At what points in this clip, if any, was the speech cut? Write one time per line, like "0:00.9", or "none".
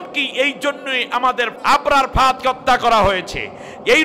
0:01.6